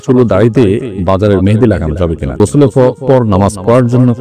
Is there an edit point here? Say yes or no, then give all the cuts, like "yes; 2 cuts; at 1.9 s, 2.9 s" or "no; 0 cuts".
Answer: yes; 2 cuts; at 0.9 s, 2.4 s